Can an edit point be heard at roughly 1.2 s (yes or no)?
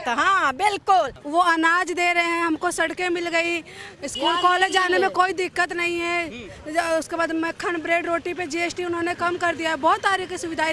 no